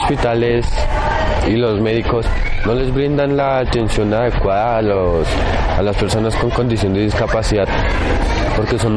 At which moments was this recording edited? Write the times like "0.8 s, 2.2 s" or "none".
none